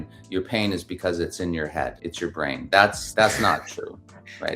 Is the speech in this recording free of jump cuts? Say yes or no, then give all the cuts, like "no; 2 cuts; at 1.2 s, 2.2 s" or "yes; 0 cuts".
no; 2 cuts; at 2.0 s, 3.0 s